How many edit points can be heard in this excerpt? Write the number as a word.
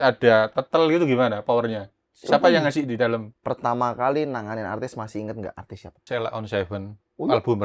two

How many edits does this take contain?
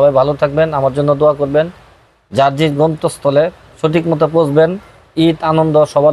zero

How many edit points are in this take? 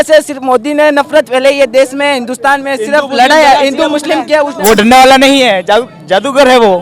one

